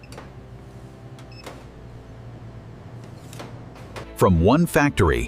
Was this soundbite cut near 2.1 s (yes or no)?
no